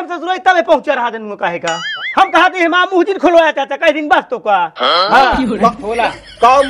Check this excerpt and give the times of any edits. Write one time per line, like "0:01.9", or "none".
0:01.9